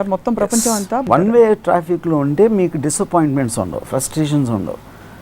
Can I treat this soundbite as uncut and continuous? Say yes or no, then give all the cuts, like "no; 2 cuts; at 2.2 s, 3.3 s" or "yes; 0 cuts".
no; 1 cut; at 1.1 s